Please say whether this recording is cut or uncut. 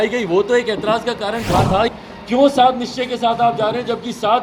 cut